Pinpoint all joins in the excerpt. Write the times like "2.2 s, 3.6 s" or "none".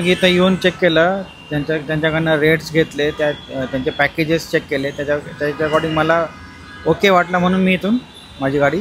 none